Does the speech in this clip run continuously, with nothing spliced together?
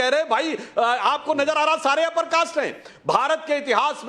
no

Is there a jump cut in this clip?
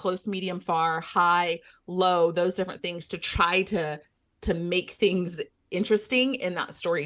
no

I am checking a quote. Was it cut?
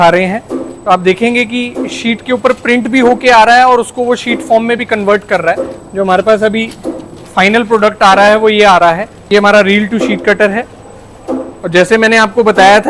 yes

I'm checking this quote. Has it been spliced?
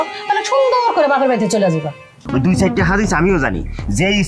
yes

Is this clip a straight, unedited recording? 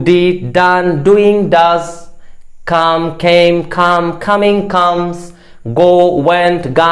yes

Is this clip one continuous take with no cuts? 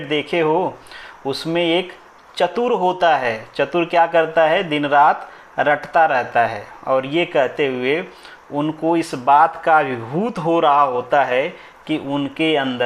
yes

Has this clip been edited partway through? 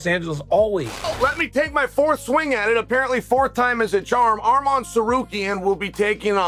yes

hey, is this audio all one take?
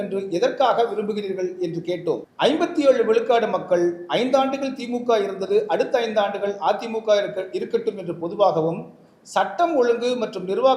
no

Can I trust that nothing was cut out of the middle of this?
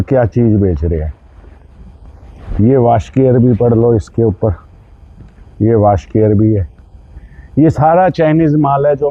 yes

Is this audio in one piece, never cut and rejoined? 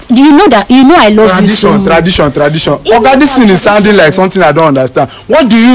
yes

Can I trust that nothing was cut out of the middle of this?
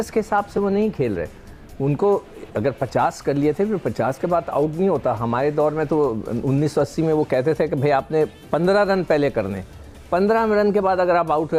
yes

